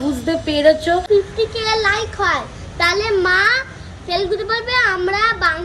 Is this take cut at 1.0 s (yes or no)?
yes